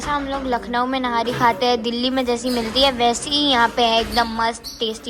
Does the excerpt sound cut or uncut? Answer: uncut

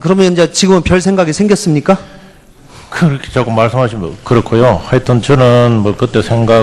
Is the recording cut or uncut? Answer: uncut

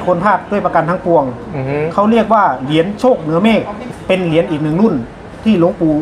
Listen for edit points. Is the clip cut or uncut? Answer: cut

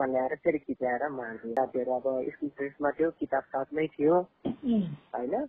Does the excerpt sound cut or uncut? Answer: cut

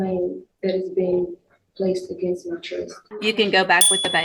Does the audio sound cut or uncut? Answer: cut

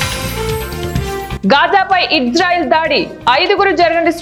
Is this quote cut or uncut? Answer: uncut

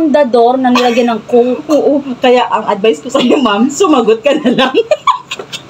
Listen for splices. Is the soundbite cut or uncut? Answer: uncut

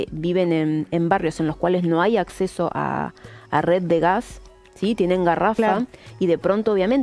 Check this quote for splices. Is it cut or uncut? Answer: uncut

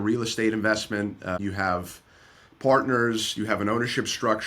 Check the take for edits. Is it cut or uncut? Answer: cut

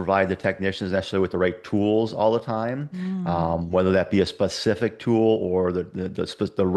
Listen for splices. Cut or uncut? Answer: uncut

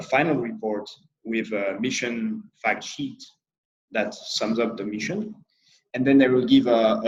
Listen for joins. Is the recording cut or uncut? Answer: uncut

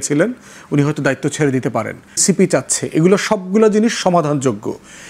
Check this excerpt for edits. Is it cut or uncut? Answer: cut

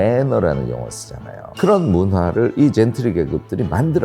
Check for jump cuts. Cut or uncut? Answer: cut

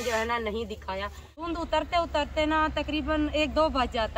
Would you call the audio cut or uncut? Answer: cut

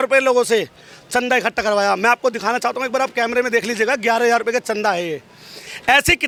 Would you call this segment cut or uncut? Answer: uncut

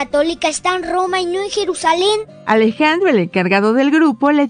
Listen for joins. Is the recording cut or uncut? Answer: uncut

